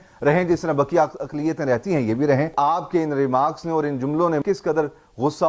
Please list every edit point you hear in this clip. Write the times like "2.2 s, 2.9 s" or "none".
2.5 s, 4.4 s